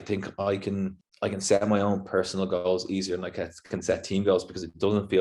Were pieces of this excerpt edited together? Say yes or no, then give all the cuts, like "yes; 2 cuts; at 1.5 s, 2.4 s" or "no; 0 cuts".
yes; 1 cut; at 1.0 s